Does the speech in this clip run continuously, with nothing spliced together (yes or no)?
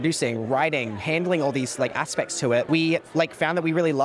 yes